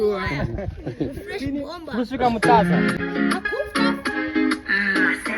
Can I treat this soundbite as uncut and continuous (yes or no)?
no